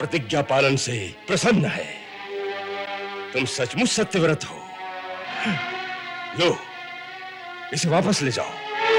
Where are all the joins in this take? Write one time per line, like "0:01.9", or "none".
none